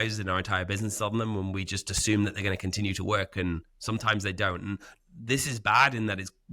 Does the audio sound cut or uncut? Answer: cut